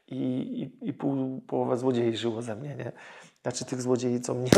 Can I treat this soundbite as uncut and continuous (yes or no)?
yes